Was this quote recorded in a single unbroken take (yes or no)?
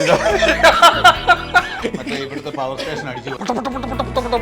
no